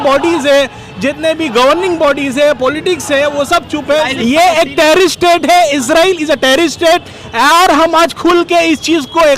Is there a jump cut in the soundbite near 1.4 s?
no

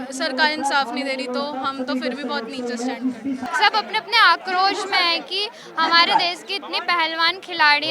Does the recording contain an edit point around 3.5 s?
yes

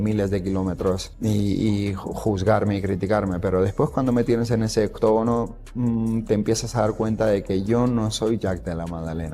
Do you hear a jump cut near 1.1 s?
yes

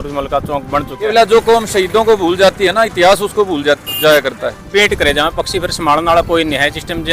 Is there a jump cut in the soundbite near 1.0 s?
yes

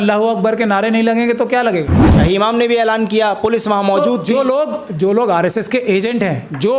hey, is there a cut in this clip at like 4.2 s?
no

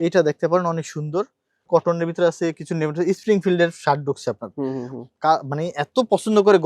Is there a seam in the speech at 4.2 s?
no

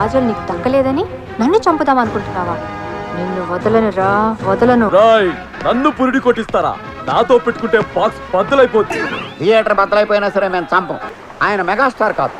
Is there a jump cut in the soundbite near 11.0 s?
yes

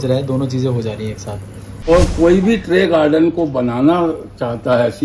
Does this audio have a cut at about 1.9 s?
yes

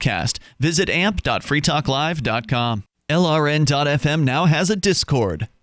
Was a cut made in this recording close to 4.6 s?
no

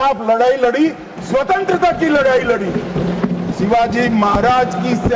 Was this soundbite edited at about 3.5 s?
yes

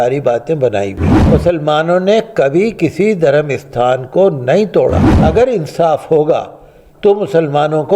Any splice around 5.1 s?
yes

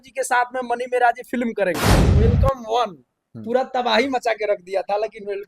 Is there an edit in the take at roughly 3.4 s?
no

